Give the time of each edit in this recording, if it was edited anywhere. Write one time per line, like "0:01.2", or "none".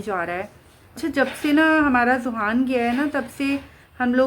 0:01.0